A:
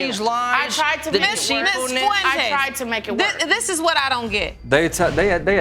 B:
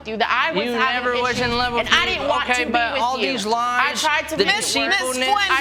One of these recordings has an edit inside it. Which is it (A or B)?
A